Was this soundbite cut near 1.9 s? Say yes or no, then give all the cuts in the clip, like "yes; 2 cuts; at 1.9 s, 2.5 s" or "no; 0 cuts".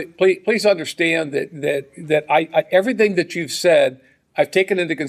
no; 0 cuts